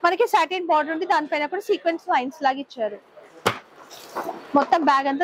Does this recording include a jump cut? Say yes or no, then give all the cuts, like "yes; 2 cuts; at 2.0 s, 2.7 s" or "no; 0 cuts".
no; 0 cuts